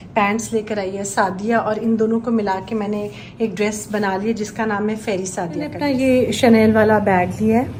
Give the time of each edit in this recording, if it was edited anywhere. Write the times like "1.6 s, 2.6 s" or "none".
none